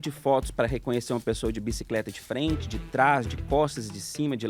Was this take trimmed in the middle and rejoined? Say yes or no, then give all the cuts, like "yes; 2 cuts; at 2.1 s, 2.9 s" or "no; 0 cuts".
no; 0 cuts